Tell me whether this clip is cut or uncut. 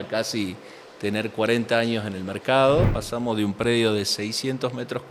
cut